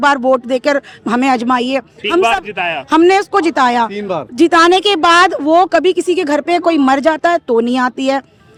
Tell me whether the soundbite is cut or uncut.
uncut